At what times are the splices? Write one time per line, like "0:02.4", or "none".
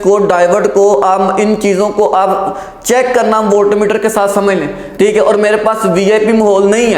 0:04.8

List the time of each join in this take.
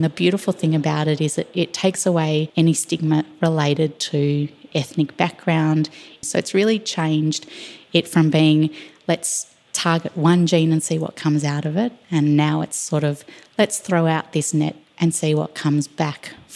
0:02.5
0:06.2

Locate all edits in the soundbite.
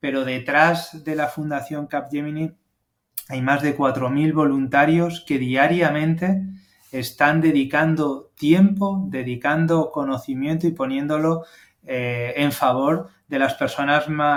none

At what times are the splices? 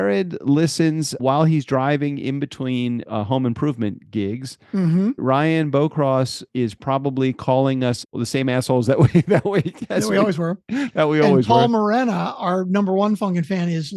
0:01.1
0:03.0
0:05.2
0:06.4
0:08.2

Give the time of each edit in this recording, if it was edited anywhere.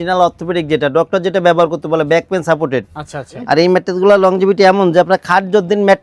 0:03.3

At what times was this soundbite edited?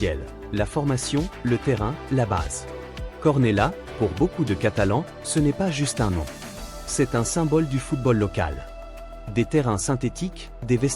none

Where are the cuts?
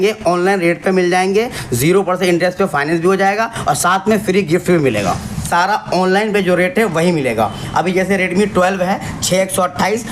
0:05.4

